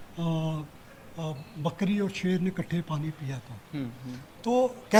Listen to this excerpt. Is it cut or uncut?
uncut